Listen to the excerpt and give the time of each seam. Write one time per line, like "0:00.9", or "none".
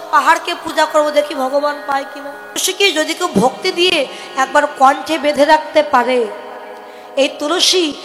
0:02.6